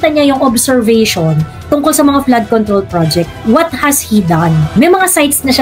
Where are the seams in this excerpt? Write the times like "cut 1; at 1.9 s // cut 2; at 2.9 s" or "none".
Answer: cut 1; at 4.7 s

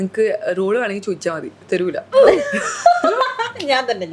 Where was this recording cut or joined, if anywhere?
cut 1; at 2.1 s

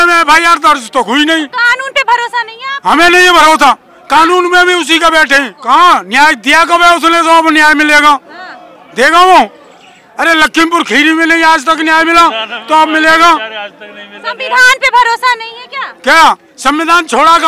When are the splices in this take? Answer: cut 1; at 5.5 s

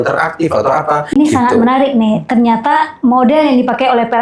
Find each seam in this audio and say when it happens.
cut 1; at 1.1 s

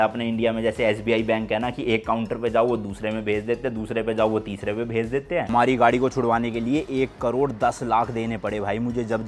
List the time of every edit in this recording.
cut 1; at 5.5 s

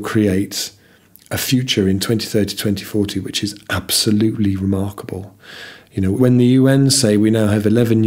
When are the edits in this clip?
cut 1; at 6.2 s

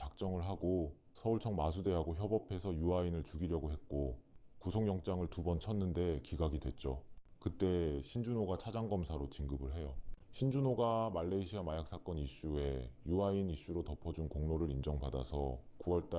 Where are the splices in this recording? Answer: none

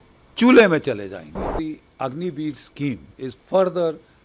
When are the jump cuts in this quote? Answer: cut 1; at 1.5 s // cut 2; at 3.1 s

